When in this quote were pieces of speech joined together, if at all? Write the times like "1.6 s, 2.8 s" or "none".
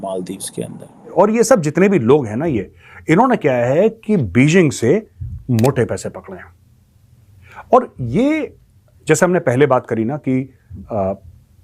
1.1 s

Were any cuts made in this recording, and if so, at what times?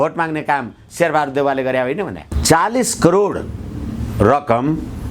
2.3 s

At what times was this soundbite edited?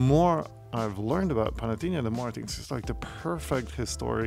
none

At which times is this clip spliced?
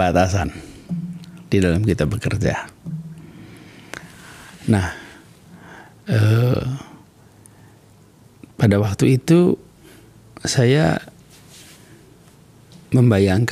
none

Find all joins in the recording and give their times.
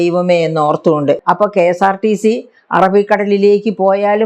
1.2 s

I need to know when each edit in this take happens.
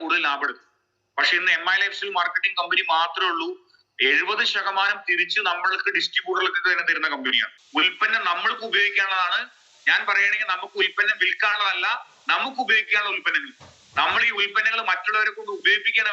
7.5 s

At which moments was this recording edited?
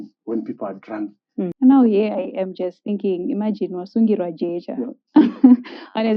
1.5 s

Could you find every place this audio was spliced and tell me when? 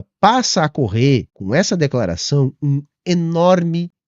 1.4 s

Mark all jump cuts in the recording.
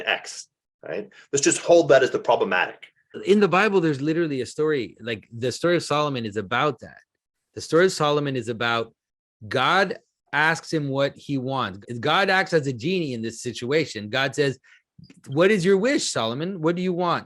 3.1 s, 11.8 s

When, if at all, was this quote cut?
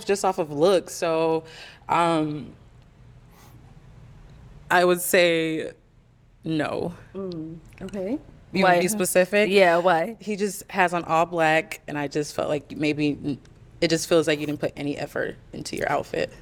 none

